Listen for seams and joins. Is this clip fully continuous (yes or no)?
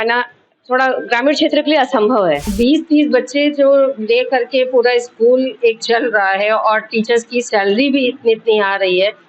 no